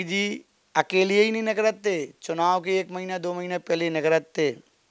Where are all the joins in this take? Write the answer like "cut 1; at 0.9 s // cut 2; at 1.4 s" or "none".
none

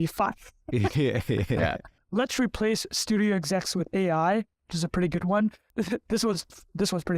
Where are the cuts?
cut 1; at 2.0 s

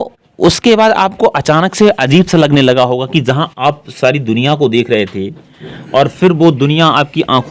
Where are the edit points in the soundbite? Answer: none

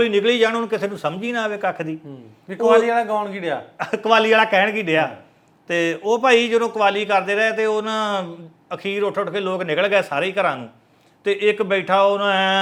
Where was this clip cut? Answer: none

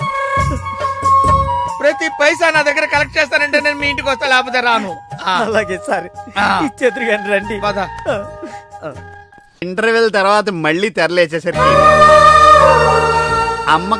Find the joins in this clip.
cut 1; at 9.6 s

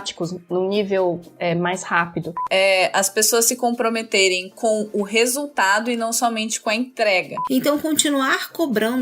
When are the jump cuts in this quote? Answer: cut 1; at 2.4 s // cut 2; at 7.4 s

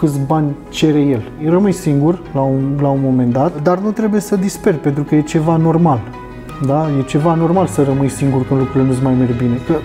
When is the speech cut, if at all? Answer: cut 1; at 1.4 s

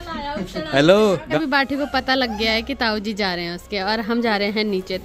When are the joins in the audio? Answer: cut 1; at 1.3 s

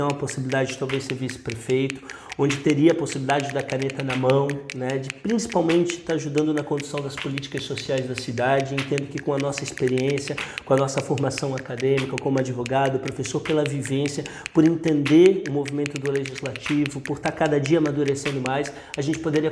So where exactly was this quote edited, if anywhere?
none

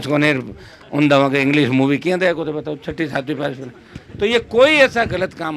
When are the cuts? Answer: none

